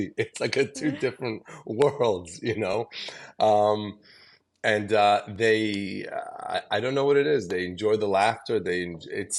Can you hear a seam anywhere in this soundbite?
no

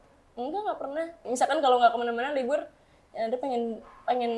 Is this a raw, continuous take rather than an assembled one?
no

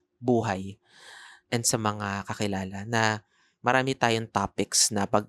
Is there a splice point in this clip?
no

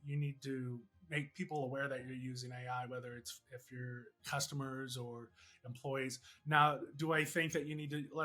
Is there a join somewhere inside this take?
yes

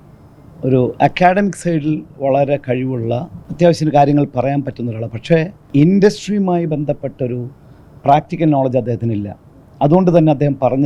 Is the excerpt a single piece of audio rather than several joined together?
no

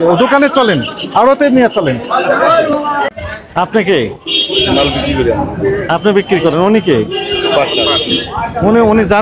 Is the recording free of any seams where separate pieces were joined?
no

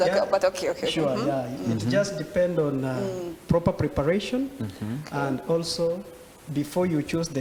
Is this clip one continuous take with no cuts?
yes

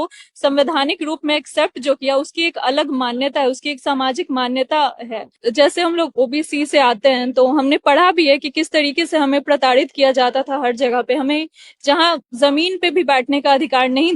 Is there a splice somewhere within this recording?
yes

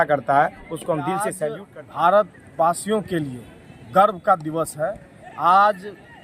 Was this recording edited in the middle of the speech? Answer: yes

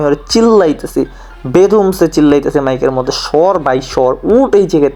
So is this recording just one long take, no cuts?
yes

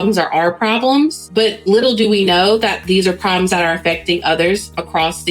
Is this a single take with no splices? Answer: no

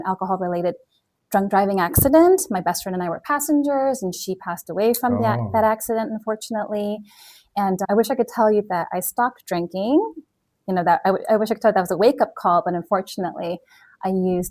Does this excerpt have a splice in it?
no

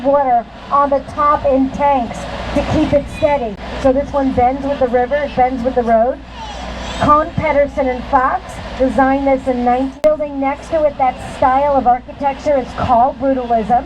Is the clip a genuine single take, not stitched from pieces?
no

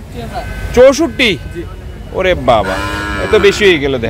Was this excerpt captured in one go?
yes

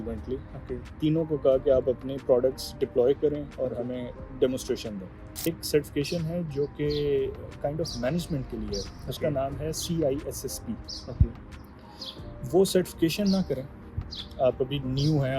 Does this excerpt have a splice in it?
yes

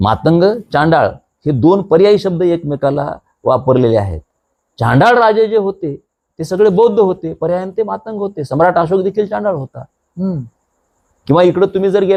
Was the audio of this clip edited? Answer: no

